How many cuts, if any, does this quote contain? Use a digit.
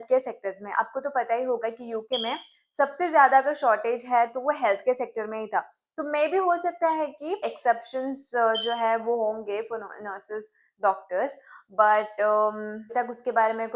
0